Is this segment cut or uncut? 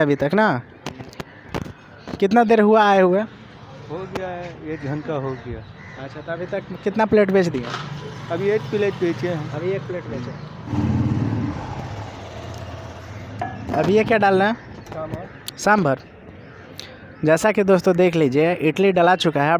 cut